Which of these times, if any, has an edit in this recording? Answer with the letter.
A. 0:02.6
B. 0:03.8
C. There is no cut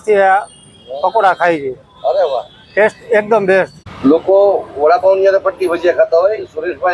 B